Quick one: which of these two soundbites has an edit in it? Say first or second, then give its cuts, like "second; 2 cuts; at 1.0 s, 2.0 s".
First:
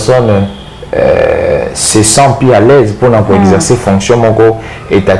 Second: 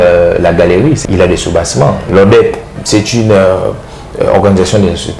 second; 3 cuts; at 1.0 s, 2.1 s, 2.7 s